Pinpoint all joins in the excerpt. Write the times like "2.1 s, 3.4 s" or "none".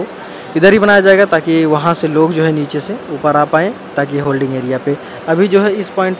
none